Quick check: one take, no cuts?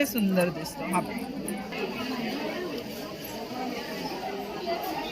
no; 1 cut; at 1.8 s

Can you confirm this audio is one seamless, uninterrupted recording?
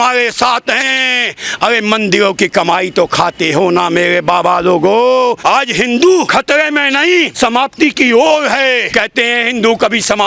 no; 4 cuts; at 5.4 s, 6.3 s, 7.3 s, 8.8 s

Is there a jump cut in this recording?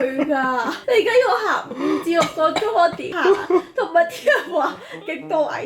no; 0 cuts

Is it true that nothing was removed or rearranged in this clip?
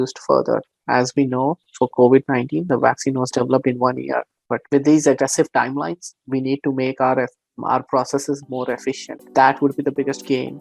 yes; 0 cuts

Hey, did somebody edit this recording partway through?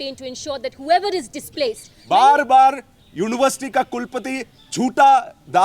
yes; 1 cut; at 1.9 s

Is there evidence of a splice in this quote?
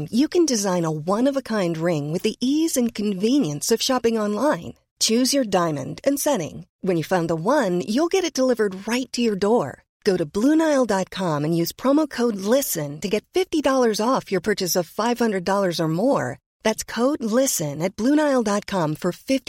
no; 0 cuts

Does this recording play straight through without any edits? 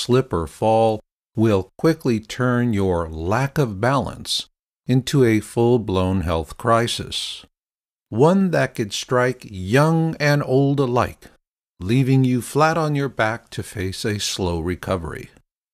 no; 1 cut; at 3.0 s

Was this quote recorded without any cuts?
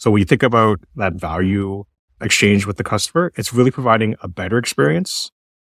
yes; 0 cuts

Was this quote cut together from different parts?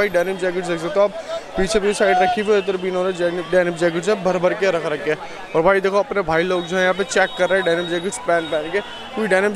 no; 0 cuts

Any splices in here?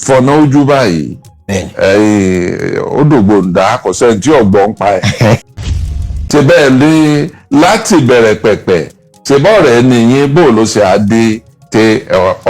yes; 1 cut; at 5.6 s

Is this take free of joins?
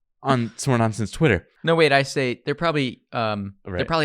no; 1 cut; at 1.5 s

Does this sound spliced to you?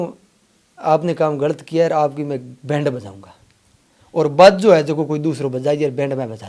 no; 0 cuts

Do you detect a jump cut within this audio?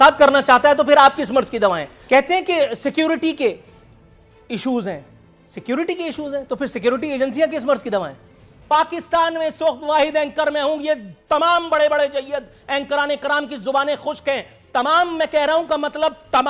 yes; 2 cuts; at 1.9 s, 8.5 s

